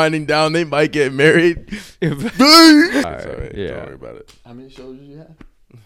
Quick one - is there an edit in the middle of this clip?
yes; 1 cut; at 3.1 s

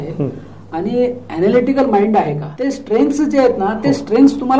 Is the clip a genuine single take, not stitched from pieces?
no; 1 cut; at 2.5 s

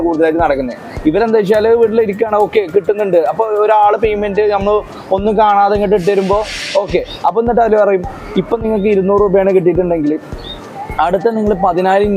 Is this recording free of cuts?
yes; 0 cuts

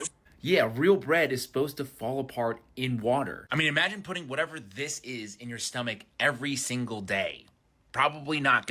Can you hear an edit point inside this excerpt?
no; 0 cuts

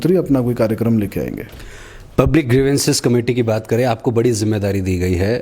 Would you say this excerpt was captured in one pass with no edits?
yes; 0 cuts

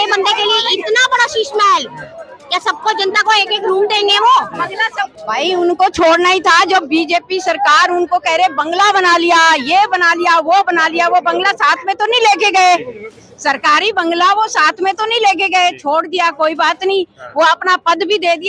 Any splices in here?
yes; 1 cut; at 5.0 s

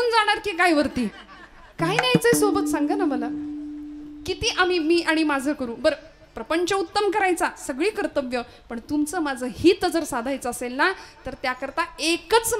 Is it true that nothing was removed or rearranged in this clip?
yes; 0 cuts

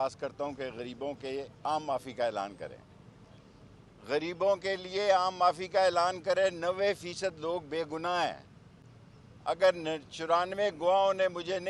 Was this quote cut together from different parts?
no; 0 cuts

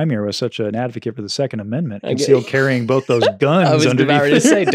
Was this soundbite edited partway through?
no; 0 cuts

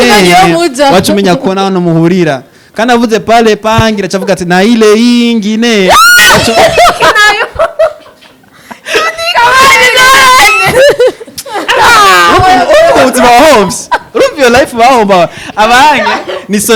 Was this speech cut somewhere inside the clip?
no; 0 cuts

